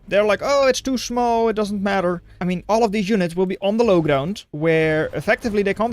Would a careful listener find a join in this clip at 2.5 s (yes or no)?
yes